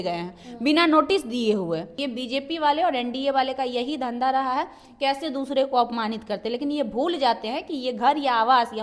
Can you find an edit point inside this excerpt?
yes; 1 cut; at 2.0 s

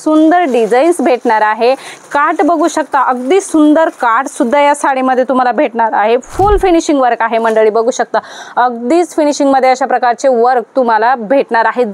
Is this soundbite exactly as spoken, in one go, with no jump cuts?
yes; 0 cuts

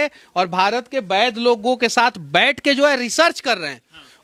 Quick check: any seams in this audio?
no; 0 cuts

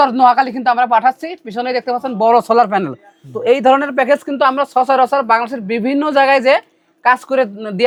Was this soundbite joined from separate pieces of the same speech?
no; 0 cuts

